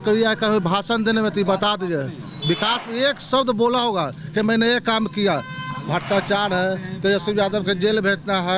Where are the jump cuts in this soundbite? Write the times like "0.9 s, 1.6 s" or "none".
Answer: none